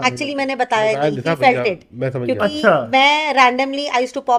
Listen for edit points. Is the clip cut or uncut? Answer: uncut